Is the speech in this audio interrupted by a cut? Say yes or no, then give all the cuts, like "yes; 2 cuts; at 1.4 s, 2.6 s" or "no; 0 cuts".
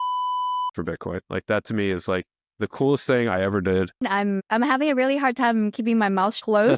yes; 1 cut; at 4.1 s